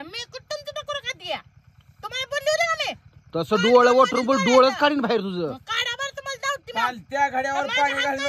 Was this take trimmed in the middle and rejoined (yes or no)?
no